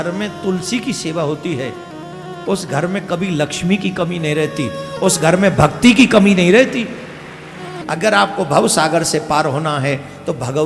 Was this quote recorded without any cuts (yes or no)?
no